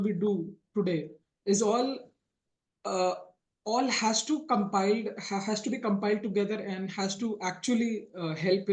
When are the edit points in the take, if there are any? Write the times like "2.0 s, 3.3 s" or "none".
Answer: none